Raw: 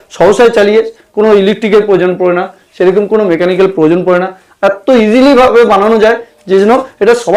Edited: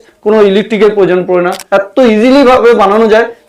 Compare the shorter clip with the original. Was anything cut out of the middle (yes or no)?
yes